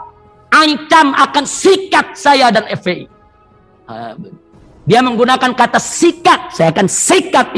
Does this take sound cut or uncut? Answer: uncut